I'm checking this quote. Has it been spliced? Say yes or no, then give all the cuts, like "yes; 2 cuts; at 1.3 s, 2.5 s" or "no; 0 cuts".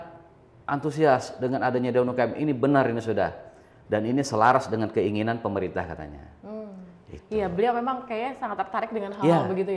no; 0 cuts